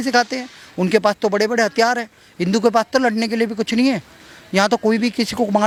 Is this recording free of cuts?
yes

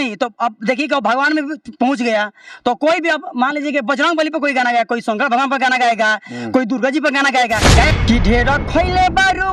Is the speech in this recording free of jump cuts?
no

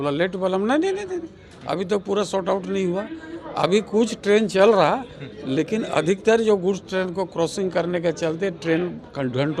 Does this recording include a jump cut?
no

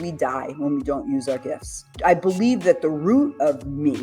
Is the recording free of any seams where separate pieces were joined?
no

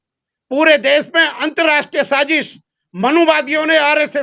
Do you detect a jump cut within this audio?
no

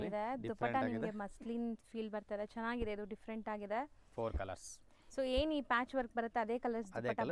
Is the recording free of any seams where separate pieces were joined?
yes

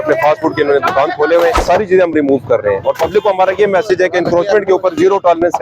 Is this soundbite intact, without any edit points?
no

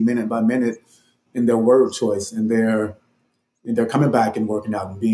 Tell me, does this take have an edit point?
no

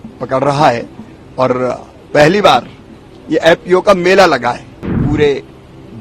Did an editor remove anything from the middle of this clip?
yes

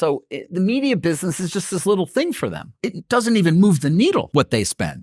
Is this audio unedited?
no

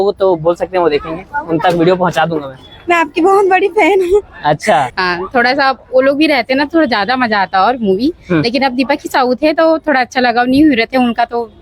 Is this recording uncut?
no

